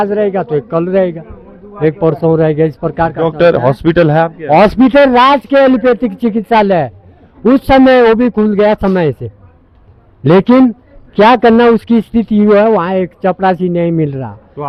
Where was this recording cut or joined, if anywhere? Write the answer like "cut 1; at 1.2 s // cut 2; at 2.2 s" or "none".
none